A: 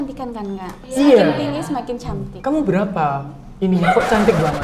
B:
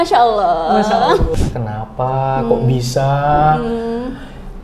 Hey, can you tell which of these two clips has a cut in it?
B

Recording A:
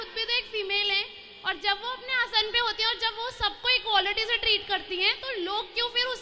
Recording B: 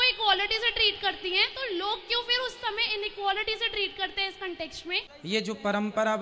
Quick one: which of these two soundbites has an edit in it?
B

